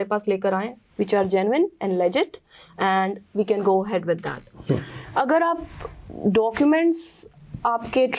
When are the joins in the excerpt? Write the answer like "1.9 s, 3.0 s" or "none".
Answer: none